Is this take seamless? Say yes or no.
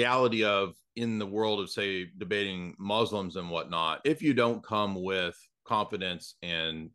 yes